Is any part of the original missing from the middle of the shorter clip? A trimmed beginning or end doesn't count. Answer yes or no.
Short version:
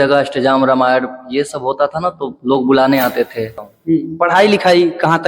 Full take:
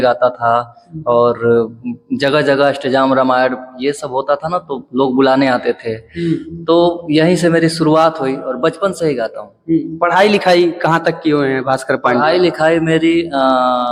yes